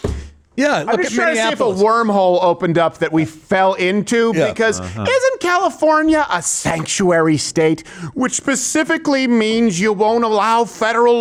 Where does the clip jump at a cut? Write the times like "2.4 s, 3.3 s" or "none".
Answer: none

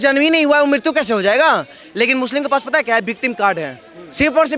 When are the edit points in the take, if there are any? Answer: 1.8 s

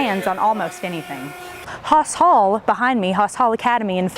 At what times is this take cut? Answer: 1.7 s

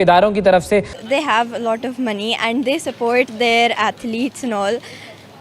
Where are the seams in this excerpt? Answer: 0.9 s

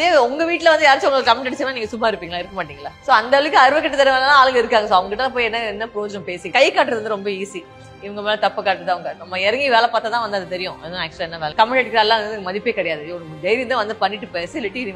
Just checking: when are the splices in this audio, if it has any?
2.8 s, 6.5 s, 11.4 s

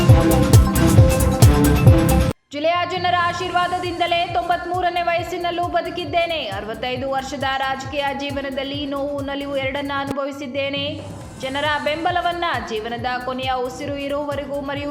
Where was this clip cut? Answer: 2.3 s

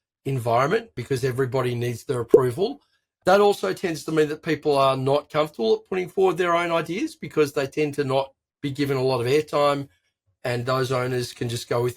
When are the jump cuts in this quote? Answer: 1.0 s

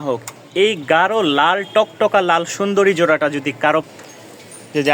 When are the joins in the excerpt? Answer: 3.8 s

